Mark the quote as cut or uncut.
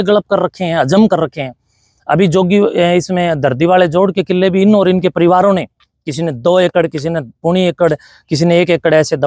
uncut